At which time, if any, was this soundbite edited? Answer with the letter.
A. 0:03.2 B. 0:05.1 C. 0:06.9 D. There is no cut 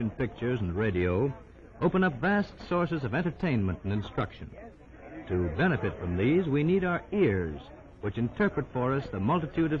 D